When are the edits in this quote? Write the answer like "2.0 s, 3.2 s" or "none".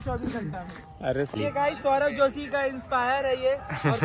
1.3 s

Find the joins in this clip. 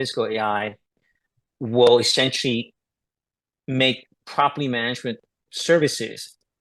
none

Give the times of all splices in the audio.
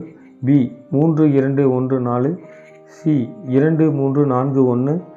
none

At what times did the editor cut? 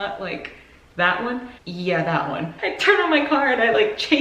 1.5 s, 2.5 s

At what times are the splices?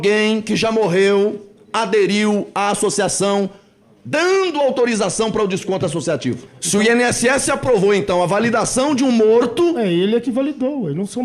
6.5 s

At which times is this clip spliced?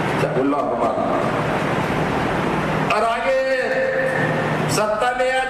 none

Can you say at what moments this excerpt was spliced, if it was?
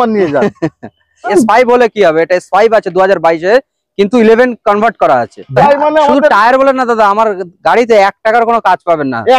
1.3 s, 5.6 s

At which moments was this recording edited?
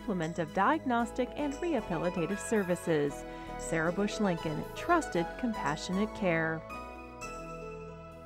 6.6 s

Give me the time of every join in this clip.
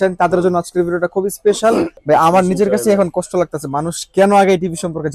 1.9 s

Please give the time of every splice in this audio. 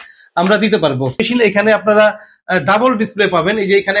1.2 s

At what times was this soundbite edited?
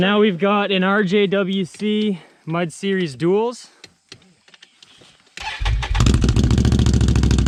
none

